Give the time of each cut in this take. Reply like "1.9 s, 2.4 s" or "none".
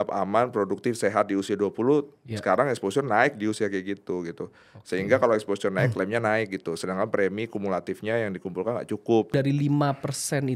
9.3 s